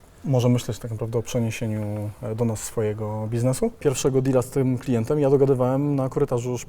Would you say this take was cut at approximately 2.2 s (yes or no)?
no